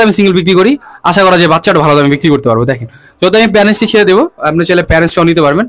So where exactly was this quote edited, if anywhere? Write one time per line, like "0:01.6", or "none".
none